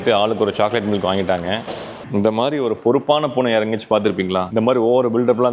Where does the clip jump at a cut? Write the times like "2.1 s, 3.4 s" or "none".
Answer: 2.0 s, 4.5 s